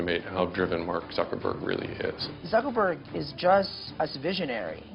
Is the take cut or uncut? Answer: cut